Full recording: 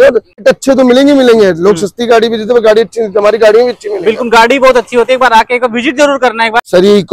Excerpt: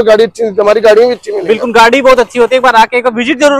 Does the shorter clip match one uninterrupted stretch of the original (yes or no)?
yes